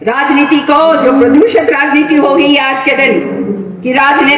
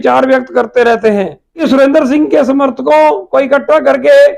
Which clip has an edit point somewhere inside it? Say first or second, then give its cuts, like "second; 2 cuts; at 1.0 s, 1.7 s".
second; 1 cut; at 1.6 s